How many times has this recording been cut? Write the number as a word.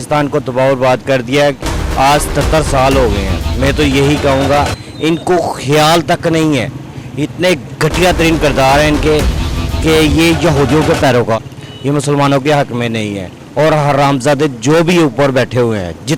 one